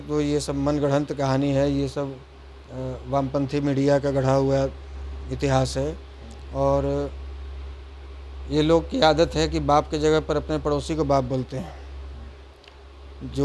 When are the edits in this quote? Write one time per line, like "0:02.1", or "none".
none